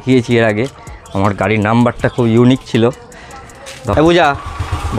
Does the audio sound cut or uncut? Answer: cut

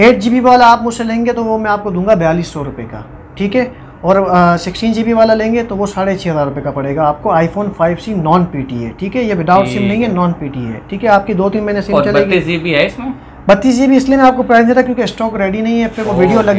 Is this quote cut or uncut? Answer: uncut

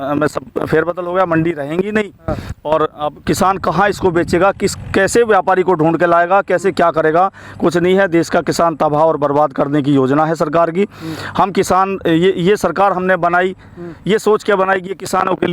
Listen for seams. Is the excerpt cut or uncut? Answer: uncut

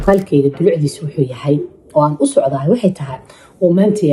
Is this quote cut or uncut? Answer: uncut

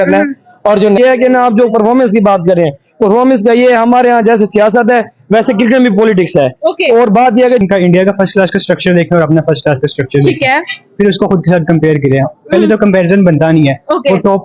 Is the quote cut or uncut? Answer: cut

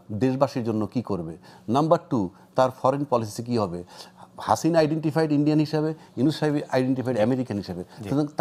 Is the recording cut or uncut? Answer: uncut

